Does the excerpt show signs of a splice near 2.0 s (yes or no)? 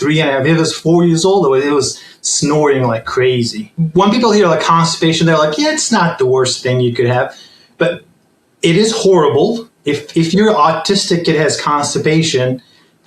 no